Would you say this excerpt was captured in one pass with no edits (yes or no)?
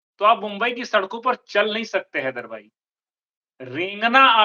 yes